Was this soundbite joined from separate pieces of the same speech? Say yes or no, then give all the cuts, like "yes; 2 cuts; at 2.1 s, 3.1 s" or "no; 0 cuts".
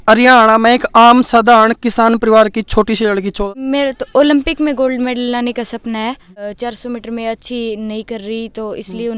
yes; 2 cuts; at 3.4 s, 6.5 s